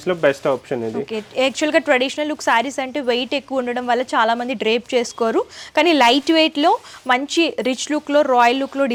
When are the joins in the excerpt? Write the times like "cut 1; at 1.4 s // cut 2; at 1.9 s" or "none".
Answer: none